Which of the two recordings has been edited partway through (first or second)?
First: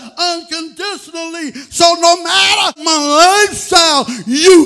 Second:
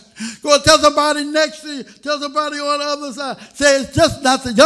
first